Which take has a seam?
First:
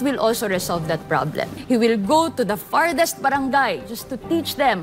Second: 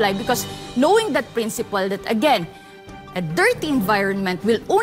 first; 1 cut; at 1.5 s

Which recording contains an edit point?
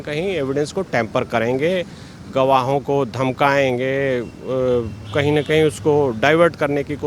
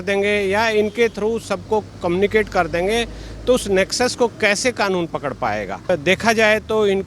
second; 1 cut; at 5.9 s

